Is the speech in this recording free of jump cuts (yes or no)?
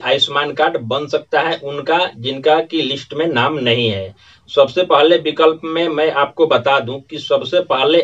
yes